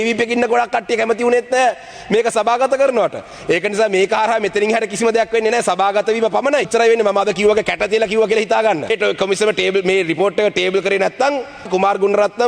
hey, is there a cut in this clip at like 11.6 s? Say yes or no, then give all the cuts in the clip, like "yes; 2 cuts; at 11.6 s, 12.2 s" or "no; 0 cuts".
yes; 3 cuts; at 6.7 s, 8.9 s, 11.6 s